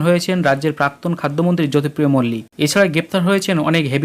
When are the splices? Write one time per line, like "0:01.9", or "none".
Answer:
0:02.4